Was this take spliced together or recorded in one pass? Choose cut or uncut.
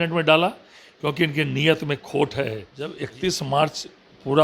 cut